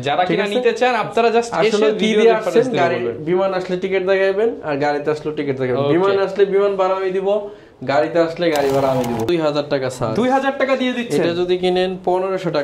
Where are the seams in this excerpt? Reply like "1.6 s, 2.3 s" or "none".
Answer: 9.3 s